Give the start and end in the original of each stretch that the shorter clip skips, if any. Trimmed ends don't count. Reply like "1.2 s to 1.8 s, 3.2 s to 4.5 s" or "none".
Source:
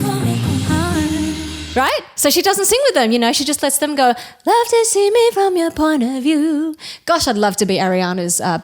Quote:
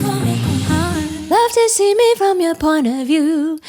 1.1 s to 4.3 s